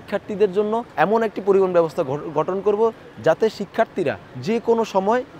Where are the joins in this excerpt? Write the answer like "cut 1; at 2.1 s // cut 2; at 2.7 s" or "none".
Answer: cut 1; at 0.9 s // cut 2; at 4.3 s